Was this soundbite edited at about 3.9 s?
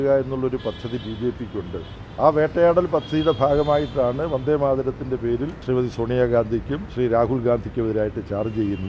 no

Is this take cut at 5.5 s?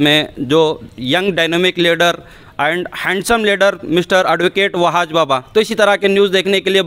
no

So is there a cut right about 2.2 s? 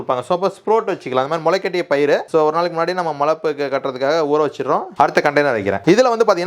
no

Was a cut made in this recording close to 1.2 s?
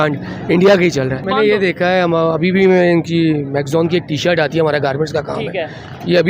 yes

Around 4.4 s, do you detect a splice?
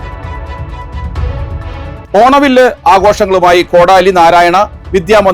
no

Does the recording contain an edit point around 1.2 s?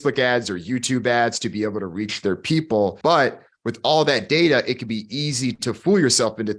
no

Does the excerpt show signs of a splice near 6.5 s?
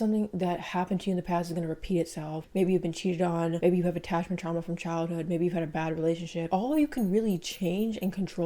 yes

